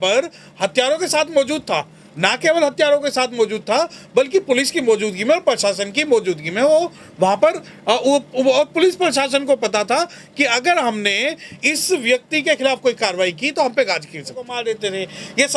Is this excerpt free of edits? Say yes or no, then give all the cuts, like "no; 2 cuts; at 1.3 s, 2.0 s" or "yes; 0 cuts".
no; 1 cut; at 14.5 s